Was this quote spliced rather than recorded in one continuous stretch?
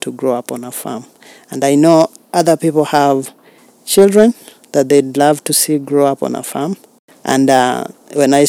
no; 0 cuts

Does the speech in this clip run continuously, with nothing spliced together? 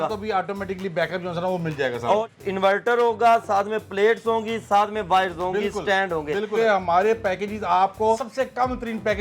no; 3 cuts; at 2.3 s, 6.5 s, 8.3 s

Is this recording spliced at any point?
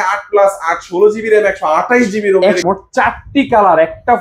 yes; 1 cut; at 2.6 s

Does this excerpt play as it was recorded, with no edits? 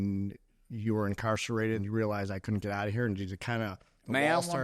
no; 1 cut; at 1.8 s

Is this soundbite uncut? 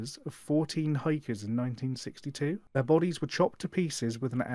no; 1 cut; at 2.6 s

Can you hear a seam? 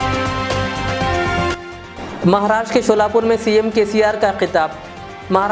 yes; 1 cut; at 1.5 s

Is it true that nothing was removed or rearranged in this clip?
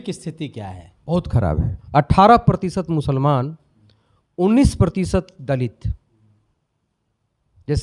no; 1 cut; at 1.7 s

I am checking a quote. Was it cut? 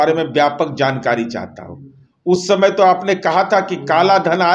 no; 0 cuts

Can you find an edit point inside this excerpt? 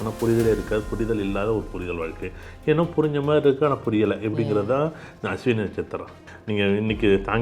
yes; 1 cut; at 6.3 s

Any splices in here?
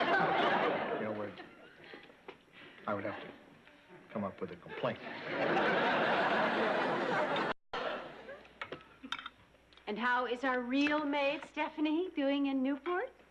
yes; 1 cut; at 11.5 s

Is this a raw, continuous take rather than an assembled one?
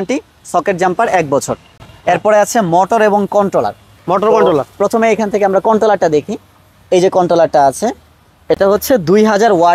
yes; 0 cuts

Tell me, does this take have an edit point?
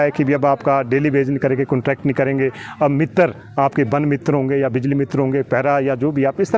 no; 0 cuts

